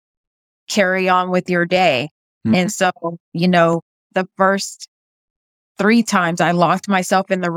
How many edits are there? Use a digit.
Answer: 2